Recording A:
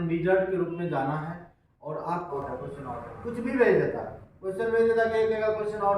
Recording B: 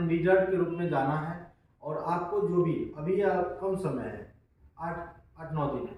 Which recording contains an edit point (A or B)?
A